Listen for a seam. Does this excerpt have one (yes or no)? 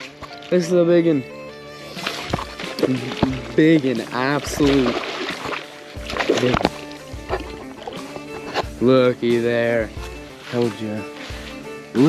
no